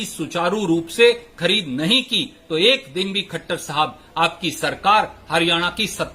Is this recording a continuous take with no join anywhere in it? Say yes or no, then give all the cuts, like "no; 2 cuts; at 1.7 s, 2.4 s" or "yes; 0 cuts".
yes; 0 cuts